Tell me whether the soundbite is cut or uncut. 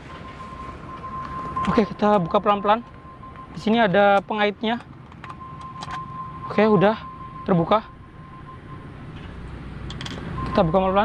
uncut